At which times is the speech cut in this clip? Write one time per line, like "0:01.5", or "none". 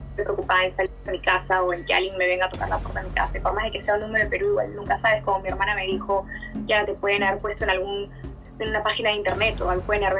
none